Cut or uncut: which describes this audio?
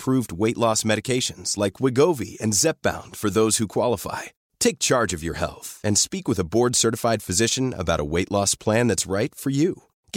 uncut